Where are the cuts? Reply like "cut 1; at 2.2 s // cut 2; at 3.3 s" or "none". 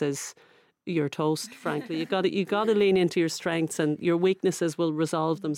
none